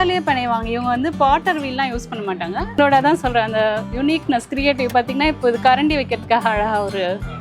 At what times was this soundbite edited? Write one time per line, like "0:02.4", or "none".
0:02.8